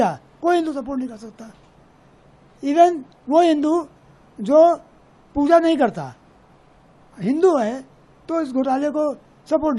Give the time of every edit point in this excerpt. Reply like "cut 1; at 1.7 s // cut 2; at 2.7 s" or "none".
none